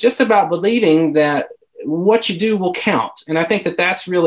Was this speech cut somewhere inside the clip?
no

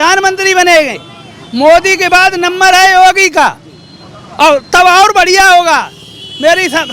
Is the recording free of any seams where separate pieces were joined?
yes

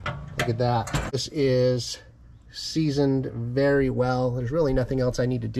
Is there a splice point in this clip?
yes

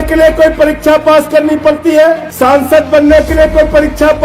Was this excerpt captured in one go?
no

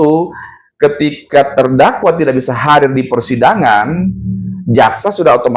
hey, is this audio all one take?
yes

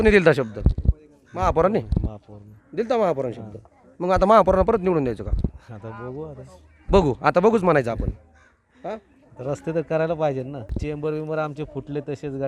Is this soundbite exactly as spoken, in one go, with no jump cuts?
no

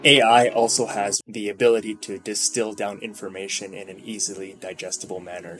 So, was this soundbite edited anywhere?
yes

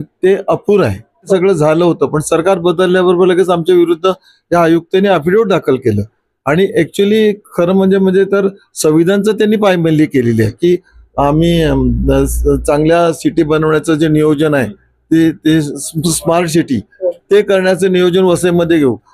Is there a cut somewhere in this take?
yes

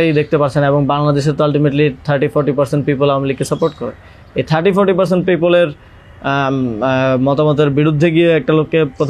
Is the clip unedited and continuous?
yes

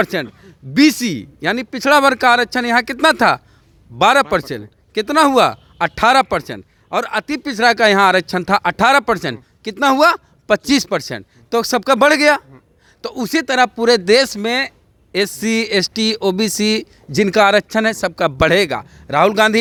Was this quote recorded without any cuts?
yes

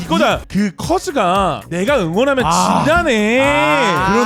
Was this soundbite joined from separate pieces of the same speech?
no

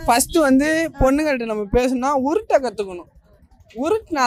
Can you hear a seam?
no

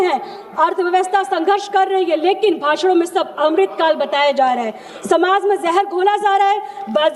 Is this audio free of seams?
yes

